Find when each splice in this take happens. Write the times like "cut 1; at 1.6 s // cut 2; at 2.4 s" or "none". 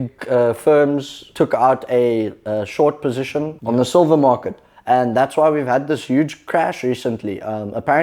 cut 1; at 1.2 s // cut 2; at 3.5 s